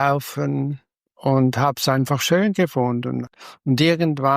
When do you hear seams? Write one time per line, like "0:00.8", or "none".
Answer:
0:03.2